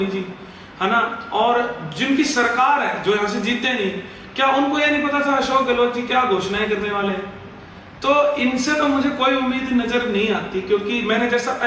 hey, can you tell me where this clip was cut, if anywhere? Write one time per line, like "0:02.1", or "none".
none